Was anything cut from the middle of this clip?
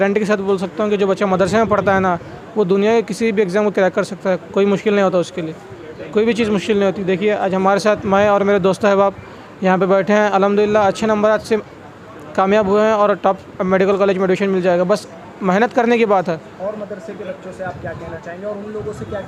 no; 0 cuts

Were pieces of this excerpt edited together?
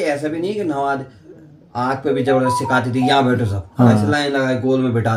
no; 0 cuts

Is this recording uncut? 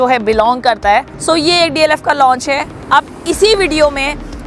no; 1 cut; at 1.1 s

